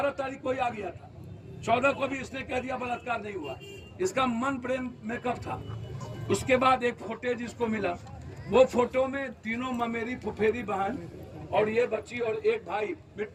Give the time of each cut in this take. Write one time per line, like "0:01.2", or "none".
none